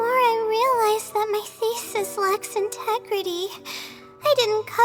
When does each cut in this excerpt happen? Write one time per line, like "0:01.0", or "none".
none